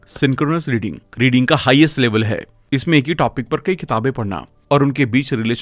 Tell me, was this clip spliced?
no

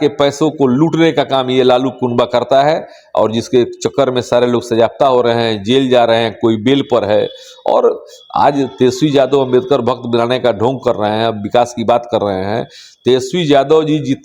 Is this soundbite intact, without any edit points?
yes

